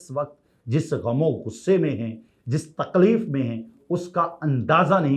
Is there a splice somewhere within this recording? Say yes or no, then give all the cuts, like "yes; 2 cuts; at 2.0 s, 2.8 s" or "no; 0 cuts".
no; 0 cuts